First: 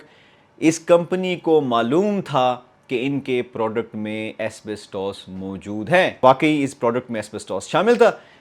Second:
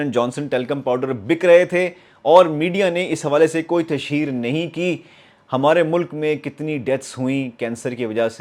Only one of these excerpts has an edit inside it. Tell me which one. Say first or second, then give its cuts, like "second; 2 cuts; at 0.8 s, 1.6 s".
first; 1 cut; at 6.2 s